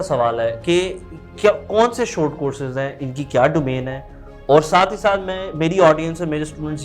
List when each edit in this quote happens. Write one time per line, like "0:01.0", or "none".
none